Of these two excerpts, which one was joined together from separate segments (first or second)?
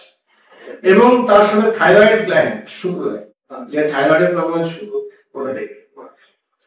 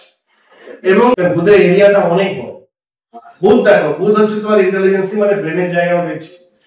second